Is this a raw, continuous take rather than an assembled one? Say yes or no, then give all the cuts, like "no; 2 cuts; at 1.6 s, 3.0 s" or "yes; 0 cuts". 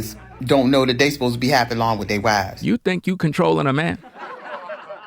yes; 0 cuts